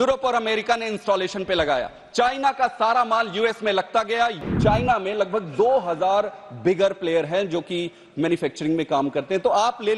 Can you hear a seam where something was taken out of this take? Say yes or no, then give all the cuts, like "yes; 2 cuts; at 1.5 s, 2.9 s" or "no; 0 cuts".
yes; 1 cut; at 4.4 s